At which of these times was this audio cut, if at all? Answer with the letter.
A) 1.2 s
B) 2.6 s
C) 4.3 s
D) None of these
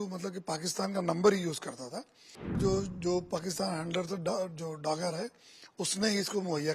B